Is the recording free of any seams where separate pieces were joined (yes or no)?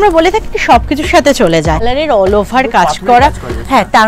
no